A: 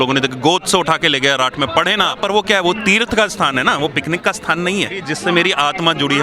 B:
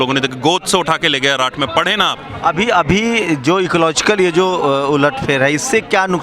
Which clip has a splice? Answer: A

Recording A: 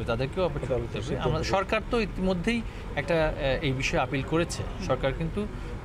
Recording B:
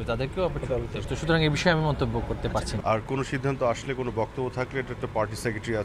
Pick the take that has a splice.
B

